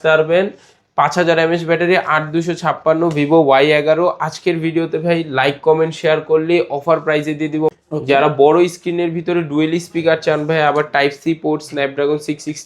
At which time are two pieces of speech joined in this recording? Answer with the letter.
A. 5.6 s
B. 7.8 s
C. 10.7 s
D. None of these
B